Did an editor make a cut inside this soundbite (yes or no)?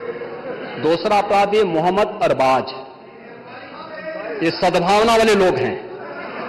no